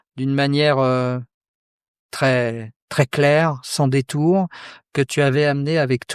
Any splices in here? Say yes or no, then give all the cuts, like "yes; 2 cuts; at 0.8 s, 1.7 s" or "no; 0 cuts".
no; 0 cuts